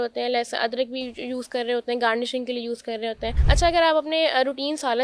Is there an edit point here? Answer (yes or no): yes